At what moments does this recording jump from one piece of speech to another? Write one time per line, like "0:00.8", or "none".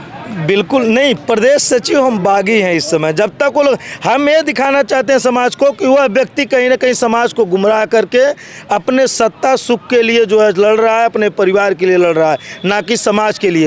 none